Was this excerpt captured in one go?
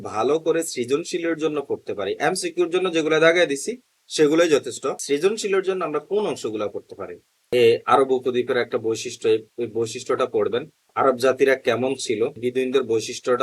no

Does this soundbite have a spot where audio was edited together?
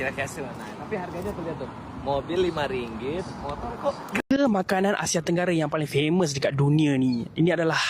yes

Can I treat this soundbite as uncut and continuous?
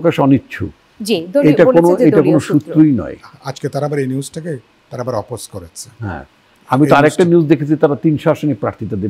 yes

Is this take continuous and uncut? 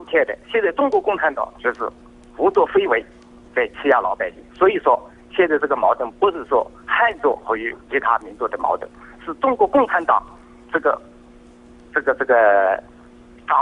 no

